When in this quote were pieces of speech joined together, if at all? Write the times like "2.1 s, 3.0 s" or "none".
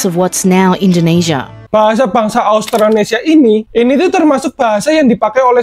1.5 s